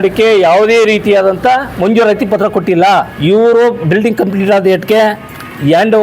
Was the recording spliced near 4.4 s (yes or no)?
no